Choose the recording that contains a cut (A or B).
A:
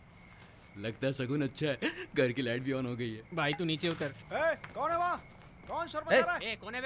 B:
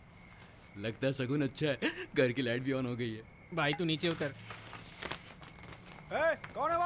A